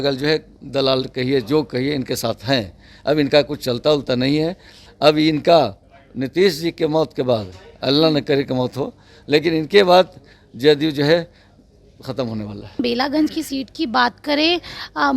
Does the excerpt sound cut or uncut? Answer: cut